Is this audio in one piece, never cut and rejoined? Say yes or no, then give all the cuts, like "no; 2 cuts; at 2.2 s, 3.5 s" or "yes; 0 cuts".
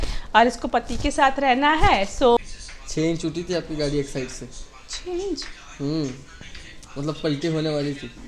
no; 1 cut; at 2.4 s